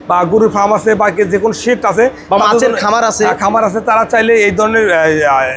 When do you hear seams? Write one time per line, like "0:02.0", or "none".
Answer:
none